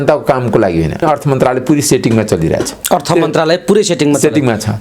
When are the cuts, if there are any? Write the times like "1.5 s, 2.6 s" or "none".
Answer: 1.0 s, 2.7 s